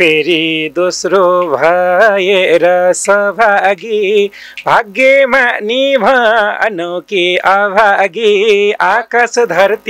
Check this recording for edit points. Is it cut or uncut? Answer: uncut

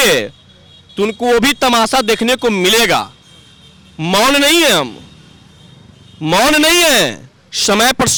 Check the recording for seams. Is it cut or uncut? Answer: uncut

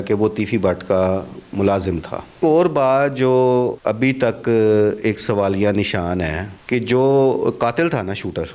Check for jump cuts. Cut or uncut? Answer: cut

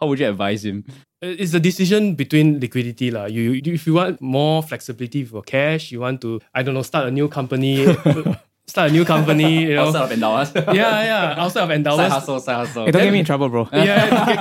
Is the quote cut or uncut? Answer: cut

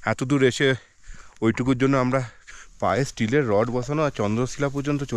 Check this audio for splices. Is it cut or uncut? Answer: cut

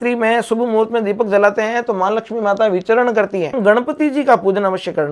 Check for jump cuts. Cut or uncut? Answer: cut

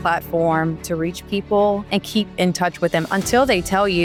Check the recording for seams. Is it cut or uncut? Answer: uncut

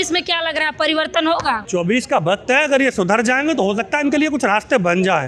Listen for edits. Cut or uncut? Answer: cut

